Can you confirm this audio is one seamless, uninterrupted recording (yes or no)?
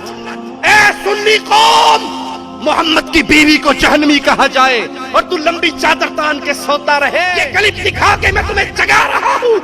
no